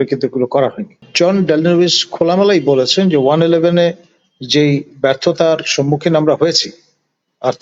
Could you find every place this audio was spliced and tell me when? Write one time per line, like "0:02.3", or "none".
0:01.0

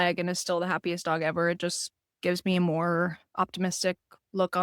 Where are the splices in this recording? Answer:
0:03.2

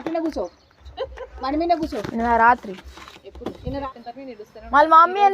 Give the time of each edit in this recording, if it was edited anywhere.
0:03.8

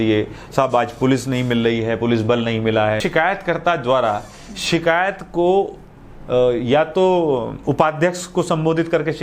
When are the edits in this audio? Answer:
0:03.0

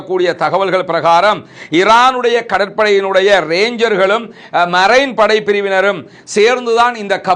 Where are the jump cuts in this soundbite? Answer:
none

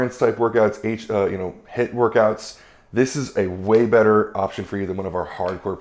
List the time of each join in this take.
none

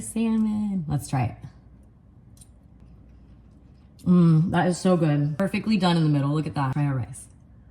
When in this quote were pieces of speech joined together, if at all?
0:02.8
0:05.4
0:06.7

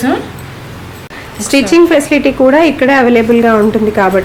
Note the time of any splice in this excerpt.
0:01.1

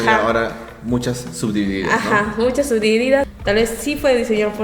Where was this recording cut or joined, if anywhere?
0:03.3

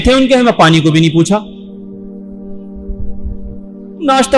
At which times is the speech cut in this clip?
none

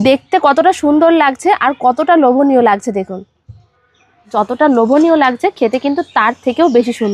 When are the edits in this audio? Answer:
0:04.3

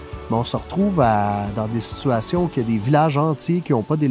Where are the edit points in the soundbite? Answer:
0:01.5

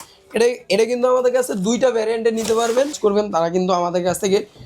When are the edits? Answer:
0:03.0

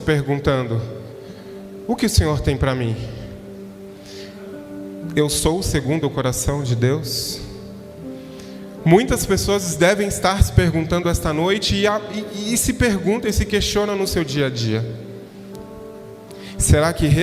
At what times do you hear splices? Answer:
none

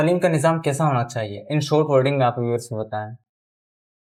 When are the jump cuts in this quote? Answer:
none

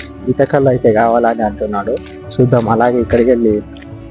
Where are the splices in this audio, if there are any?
none

